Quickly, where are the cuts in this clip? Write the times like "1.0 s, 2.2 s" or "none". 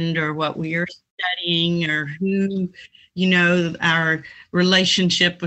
none